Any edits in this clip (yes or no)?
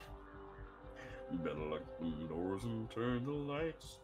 no